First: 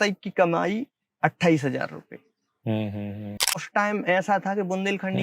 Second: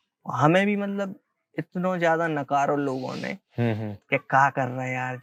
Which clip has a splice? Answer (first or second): first